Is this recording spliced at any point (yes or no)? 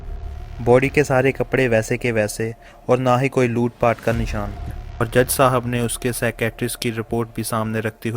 yes